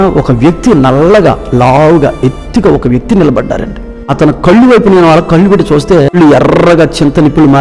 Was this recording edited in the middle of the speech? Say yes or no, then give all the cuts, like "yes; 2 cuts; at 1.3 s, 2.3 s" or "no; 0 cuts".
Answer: yes; 2 cuts; at 4.1 s, 6.1 s